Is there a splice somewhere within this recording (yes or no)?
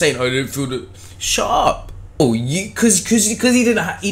yes